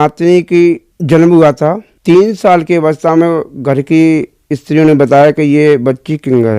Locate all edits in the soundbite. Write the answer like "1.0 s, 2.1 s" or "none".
0.9 s, 1.9 s